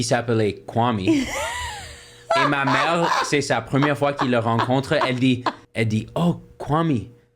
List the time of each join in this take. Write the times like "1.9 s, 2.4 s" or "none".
5.6 s